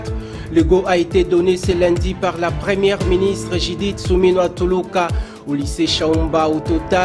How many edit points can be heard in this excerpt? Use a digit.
0